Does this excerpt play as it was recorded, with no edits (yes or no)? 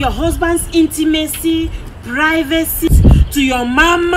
no